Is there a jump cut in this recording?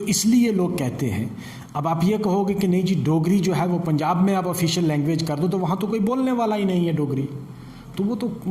no; 0 cuts

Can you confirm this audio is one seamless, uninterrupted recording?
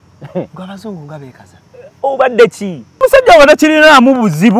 no; 1 cut; at 3.0 s

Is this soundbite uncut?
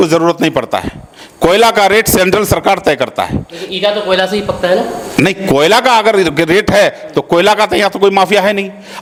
yes; 0 cuts

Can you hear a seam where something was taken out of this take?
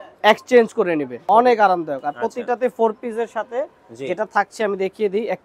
yes; 1 cut; at 1.2 s

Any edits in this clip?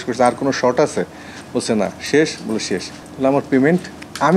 no; 0 cuts

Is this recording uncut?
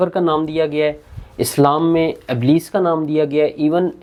yes; 0 cuts

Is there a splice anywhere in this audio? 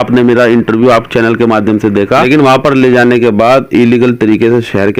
yes; 1 cut; at 2.3 s

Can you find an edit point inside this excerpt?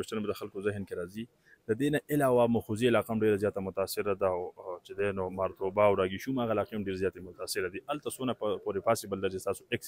no; 0 cuts

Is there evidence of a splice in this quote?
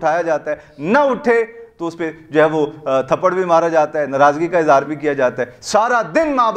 no; 0 cuts

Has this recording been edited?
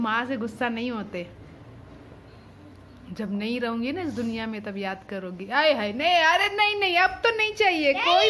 no; 0 cuts

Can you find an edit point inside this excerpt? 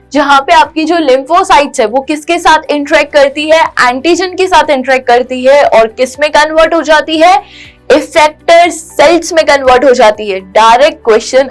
no; 0 cuts

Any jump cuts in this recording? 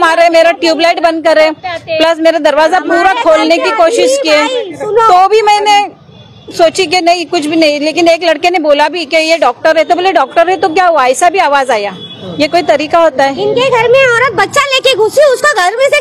no; 0 cuts

